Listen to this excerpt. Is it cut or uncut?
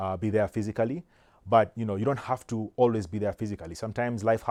uncut